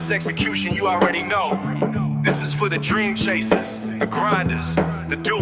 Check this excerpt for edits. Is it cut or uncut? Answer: uncut